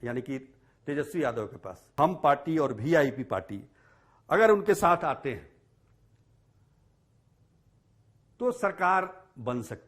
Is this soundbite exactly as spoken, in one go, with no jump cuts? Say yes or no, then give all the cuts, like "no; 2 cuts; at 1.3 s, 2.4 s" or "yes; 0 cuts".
no; 1 cut; at 1.8 s